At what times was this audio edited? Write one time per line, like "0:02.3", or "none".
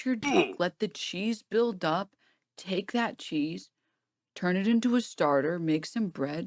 none

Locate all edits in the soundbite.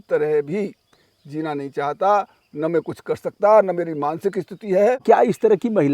0:05.0

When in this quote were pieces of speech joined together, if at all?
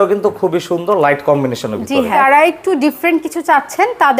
0:02.1

